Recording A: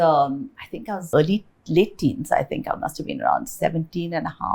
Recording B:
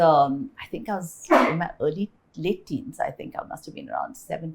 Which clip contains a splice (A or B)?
A